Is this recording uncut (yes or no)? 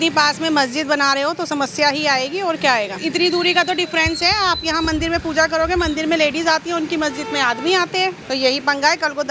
no